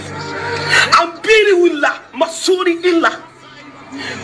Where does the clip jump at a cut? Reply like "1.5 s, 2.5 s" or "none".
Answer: none